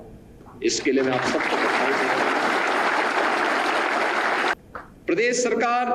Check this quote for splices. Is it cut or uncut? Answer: cut